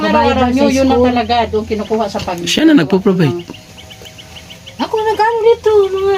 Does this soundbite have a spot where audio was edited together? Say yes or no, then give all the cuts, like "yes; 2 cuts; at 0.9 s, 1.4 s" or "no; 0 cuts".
no; 0 cuts